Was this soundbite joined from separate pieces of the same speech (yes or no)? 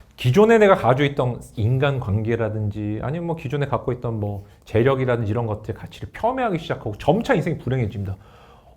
no